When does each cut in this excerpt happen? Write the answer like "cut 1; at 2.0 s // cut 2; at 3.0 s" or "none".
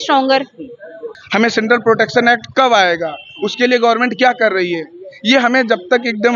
cut 1; at 1.1 s